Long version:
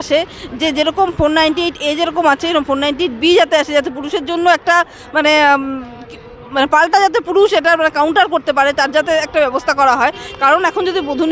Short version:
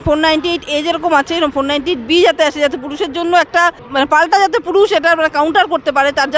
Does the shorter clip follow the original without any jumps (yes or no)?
no